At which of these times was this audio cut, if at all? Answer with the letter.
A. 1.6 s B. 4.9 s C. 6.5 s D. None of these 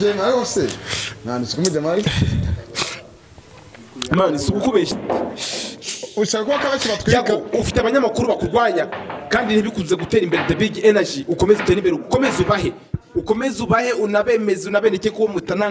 B